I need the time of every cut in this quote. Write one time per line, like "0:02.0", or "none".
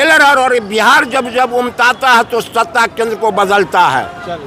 none

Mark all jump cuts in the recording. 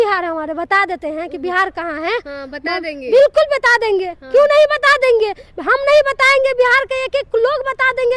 none

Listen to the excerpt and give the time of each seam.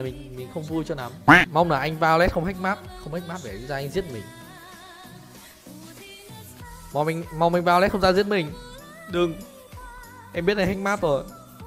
0:01.2

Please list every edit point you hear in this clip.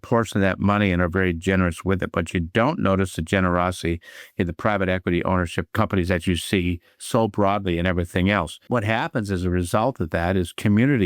0:08.7

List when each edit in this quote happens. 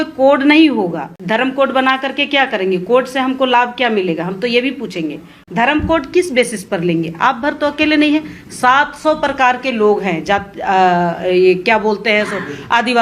0:01.1
0:05.3

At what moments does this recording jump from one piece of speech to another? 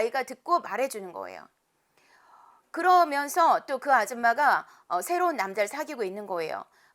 none

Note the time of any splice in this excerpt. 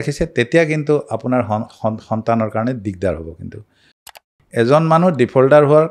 0:04.3

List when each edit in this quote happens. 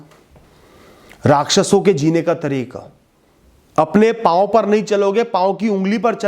0:03.3

